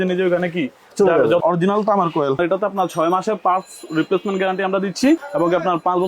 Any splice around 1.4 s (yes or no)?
yes